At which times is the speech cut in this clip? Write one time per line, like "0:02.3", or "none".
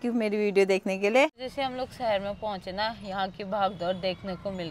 0:01.4